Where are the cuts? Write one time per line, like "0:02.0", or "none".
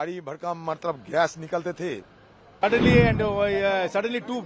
0:02.4